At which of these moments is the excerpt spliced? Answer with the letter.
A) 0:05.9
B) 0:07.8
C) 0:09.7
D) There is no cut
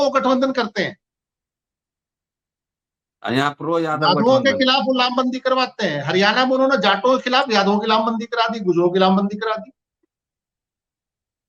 D